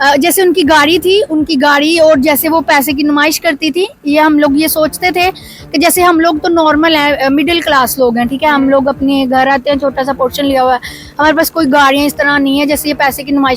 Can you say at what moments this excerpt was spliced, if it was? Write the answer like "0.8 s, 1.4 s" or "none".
none

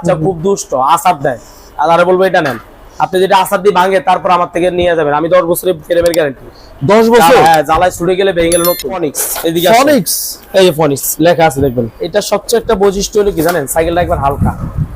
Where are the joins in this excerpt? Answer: 9.2 s, 12.0 s

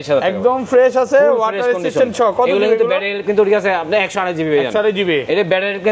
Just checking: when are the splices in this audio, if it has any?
none

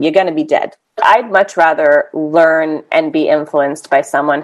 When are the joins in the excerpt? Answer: 1.0 s

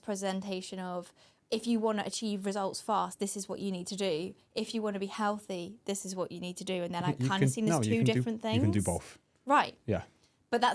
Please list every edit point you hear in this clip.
none

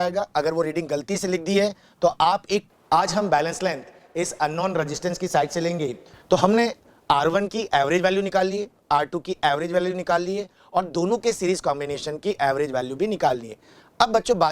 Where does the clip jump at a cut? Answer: 2.7 s, 6.1 s

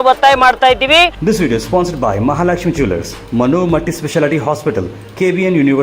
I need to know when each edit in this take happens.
1.2 s

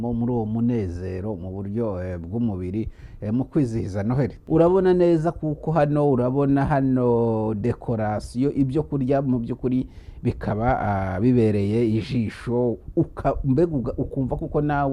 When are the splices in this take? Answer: 4.4 s

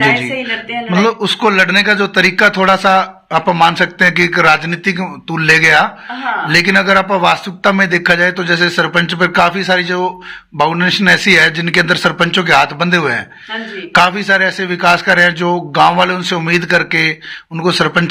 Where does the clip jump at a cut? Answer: none

